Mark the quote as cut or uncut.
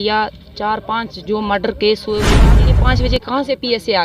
cut